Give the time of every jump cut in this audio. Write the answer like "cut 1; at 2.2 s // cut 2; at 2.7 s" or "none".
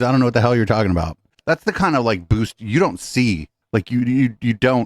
cut 1; at 1.3 s